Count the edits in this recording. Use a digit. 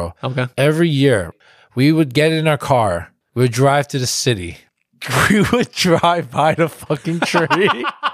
1